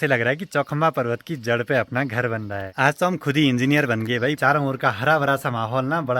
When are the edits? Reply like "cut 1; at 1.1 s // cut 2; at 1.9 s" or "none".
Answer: cut 1; at 2.7 s // cut 2; at 4.4 s